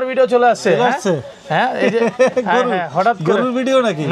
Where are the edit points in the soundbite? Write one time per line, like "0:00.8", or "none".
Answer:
none